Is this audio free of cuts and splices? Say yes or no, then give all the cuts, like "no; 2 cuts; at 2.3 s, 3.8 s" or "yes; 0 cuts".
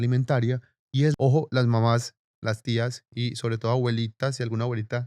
no; 1 cut; at 1.1 s